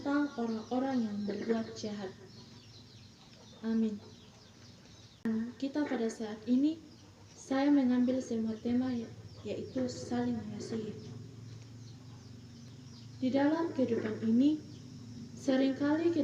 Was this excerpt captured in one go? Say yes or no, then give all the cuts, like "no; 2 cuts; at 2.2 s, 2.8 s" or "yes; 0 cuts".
no; 2 cuts; at 5.2 s, 12.7 s